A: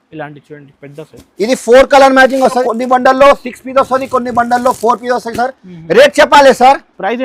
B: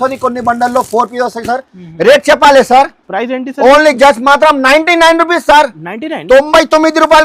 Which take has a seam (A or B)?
A